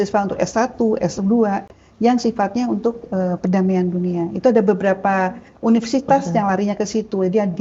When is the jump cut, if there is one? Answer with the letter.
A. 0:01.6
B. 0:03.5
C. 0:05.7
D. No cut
D